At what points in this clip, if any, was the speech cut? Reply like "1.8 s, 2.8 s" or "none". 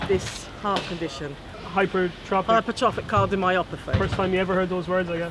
1.6 s